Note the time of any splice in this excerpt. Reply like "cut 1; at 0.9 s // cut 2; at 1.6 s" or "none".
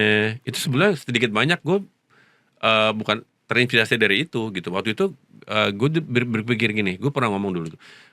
none

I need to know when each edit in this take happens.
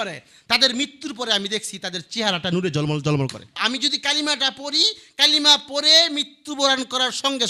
cut 1; at 3.6 s

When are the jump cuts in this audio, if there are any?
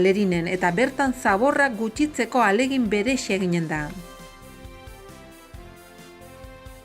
cut 1; at 4.0 s // cut 2; at 6.1 s

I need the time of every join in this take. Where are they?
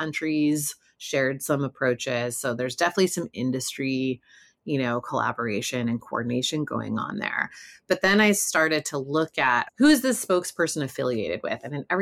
cut 1; at 9.7 s

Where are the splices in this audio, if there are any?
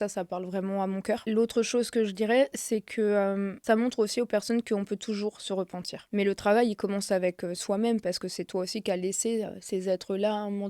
cut 1; at 1.2 s // cut 2; at 3.5 s // cut 3; at 6.0 s

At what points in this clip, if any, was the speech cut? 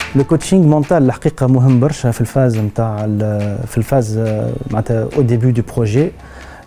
none

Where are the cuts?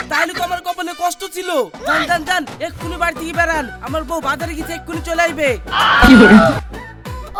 none

